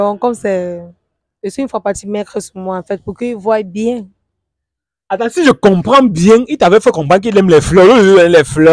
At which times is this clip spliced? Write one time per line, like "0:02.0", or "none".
none